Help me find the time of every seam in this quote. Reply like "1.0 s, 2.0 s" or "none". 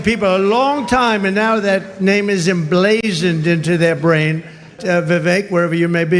4.8 s